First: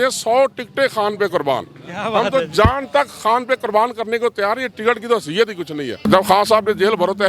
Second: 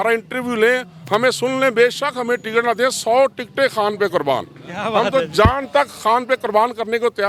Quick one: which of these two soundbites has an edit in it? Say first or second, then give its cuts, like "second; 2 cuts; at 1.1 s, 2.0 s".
first; 1 cut; at 6.0 s